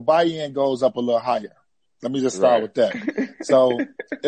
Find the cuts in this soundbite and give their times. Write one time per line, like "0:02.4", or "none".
none